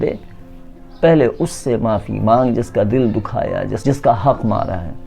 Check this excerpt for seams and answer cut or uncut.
cut